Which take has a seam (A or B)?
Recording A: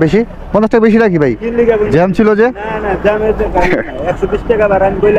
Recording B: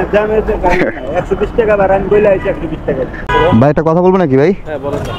B